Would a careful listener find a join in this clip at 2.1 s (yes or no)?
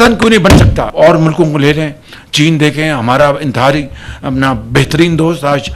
no